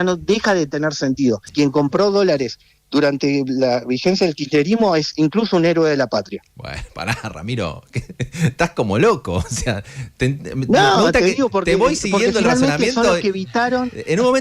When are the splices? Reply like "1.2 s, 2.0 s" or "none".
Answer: 1.5 s